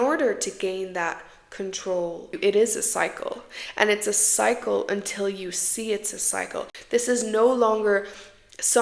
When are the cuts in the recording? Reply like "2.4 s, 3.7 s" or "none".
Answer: 2.3 s, 6.8 s